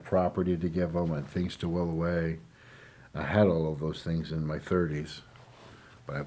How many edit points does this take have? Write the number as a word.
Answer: zero